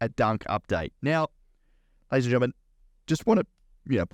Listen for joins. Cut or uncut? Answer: uncut